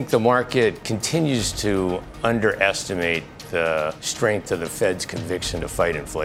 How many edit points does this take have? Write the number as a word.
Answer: one